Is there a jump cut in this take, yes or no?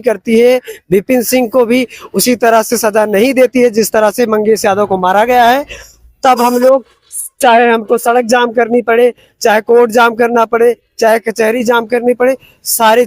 no